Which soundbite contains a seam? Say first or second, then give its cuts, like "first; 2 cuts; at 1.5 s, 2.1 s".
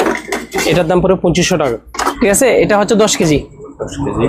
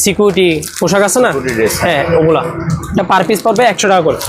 first; 1 cut; at 2.0 s